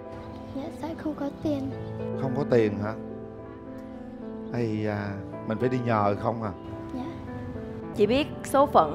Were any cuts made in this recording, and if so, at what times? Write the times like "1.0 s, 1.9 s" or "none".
7.9 s